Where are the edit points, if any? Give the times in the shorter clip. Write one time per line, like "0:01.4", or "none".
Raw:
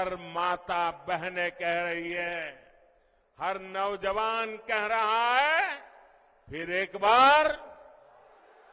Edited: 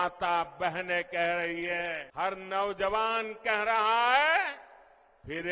0:02.0